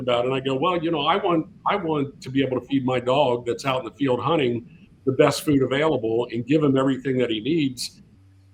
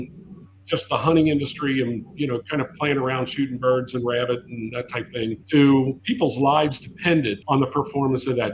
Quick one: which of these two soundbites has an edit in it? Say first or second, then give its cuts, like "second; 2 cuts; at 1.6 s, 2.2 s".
second; 3 cuts; at 5.4 s, 6.0 s, 7.4 s